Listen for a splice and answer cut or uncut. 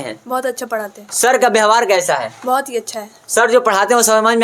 uncut